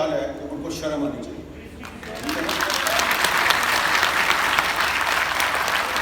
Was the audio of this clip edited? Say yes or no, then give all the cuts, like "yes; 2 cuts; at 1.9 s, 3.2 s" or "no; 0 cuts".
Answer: no; 0 cuts